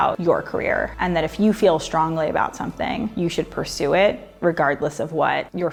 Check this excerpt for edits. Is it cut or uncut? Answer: uncut